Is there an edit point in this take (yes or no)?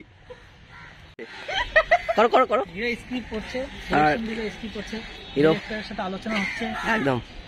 no